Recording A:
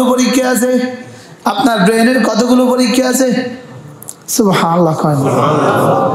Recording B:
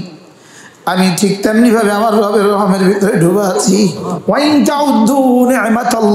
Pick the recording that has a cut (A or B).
B